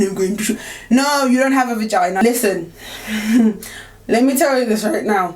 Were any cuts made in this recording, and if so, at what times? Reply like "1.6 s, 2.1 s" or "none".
2.2 s